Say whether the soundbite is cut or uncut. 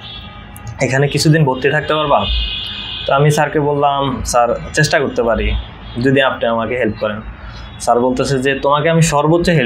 uncut